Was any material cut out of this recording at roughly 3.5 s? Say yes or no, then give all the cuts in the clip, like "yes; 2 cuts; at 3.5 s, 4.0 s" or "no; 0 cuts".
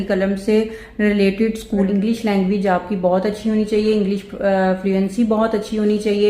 no; 1 cut; at 1.9 s